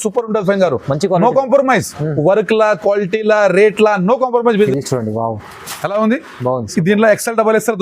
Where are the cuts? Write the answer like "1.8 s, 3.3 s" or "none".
4.7 s